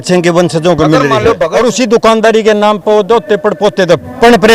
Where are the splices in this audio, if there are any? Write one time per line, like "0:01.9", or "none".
0:01.5